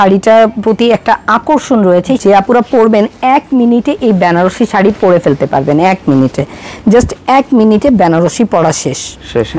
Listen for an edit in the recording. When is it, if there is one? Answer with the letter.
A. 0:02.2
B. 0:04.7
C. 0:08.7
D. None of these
A